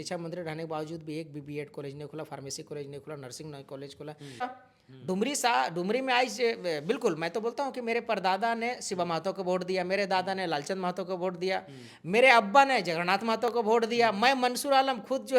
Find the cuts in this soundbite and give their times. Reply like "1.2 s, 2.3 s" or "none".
4.5 s